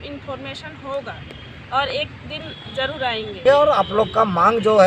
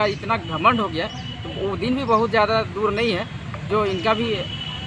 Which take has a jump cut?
first; 1 cut; at 3.4 s

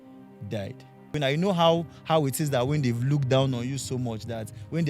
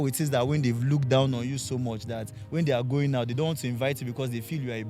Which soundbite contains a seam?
first; 1 cut; at 1.1 s

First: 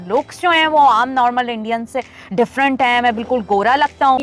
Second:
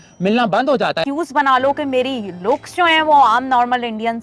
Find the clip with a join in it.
second; 1 cut; at 1.0 s

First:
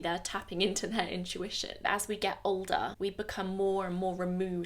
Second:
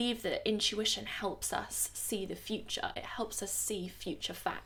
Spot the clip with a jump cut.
first; 2 cuts; at 1.8 s, 2.9 s

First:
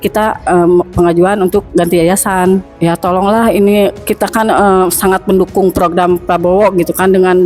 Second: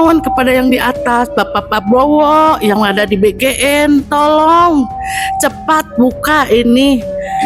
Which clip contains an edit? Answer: first; 1 cut; at 2.7 s

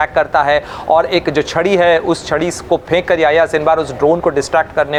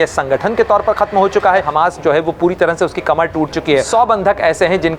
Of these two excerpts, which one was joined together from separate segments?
second; 2 cuts; at 1.7 s, 3.9 s

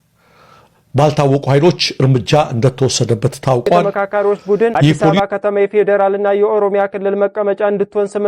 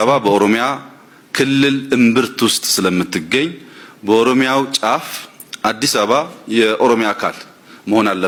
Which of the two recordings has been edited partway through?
first; 1 cut; at 3.8 s

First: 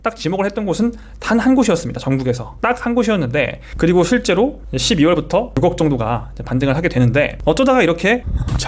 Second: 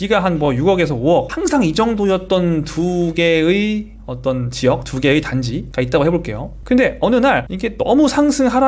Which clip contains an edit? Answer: first; 3 cuts; at 3.7 s, 5.6 s, 7.4 s

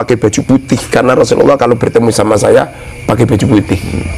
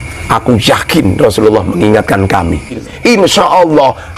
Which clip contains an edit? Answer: second; 1 cut; at 2.8 s

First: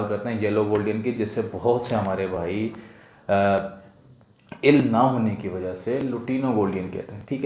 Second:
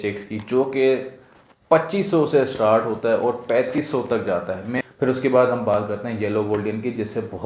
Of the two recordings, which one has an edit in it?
second; 1 cut; at 4.8 s

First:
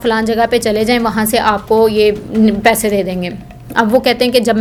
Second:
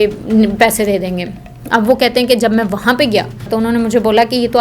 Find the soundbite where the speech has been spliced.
second; 1 cut; at 3.5 s

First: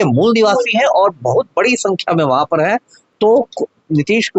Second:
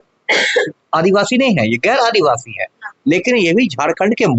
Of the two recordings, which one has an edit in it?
first; 1 cut; at 3.0 s

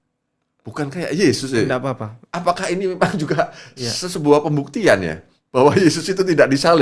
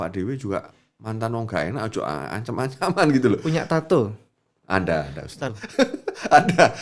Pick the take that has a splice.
second; 1 cut; at 5.5 s

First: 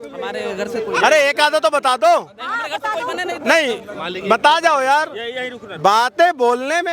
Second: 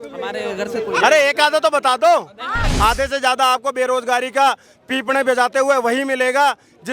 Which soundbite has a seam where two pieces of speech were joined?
second; 1 cut; at 2.7 s

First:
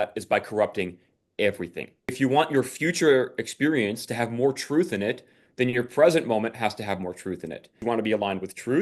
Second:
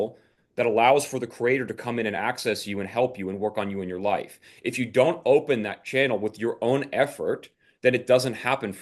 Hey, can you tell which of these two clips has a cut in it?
first; 2 cuts; at 2.2 s, 7.8 s

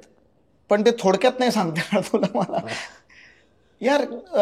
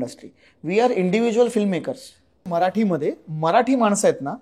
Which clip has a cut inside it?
second; 1 cut; at 2.5 s

